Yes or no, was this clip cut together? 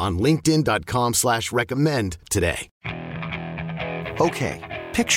yes